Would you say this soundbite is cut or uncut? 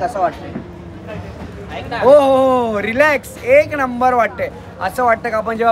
uncut